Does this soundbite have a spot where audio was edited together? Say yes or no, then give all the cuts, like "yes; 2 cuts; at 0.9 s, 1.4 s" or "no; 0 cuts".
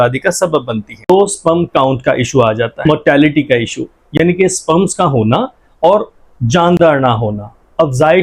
yes; 2 cuts; at 1.1 s, 2.8 s